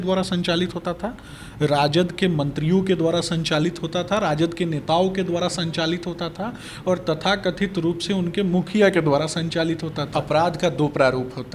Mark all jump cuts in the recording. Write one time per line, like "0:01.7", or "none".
0:10.0

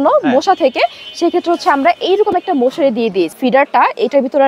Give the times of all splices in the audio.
0:03.3

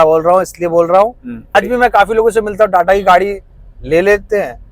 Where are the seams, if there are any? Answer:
0:01.6

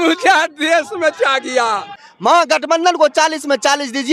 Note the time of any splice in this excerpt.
0:02.1

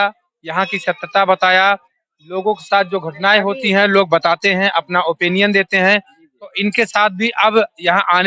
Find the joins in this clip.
none

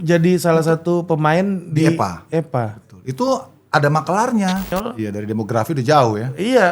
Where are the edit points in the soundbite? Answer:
0:04.7

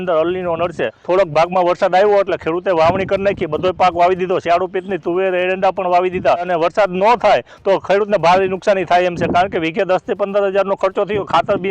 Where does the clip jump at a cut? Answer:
0:00.9
0:06.5

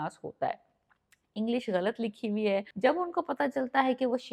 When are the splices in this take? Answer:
0:02.7

